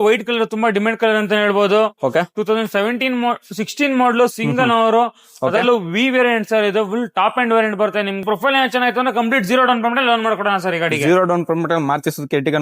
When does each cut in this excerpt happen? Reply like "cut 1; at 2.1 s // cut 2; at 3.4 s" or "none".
cut 1; at 8.2 s